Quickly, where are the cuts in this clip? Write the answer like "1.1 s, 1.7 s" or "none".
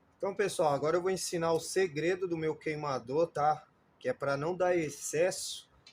none